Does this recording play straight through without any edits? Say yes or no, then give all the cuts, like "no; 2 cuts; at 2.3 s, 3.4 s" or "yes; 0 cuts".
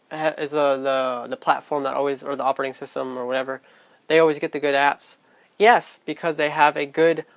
no; 1 cut; at 1.9 s